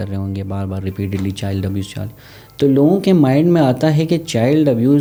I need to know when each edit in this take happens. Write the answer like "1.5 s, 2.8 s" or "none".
none